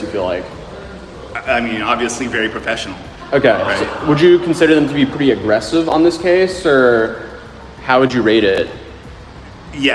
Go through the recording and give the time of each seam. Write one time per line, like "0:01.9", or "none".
none

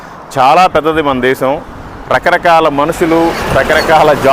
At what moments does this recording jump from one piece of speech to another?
none

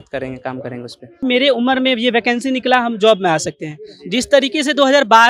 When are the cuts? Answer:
0:01.2

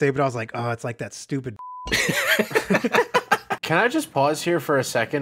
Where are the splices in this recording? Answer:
0:01.6
0:03.5

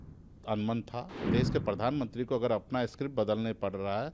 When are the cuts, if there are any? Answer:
0:01.2

